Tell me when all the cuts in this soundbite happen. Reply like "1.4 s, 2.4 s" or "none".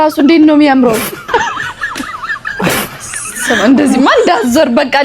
1.1 s, 3.3 s